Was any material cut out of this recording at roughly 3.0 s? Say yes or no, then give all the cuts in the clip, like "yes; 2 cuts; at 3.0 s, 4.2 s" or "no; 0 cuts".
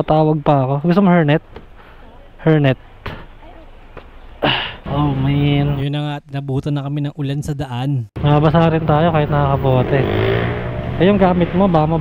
no; 1 cut; at 4.8 s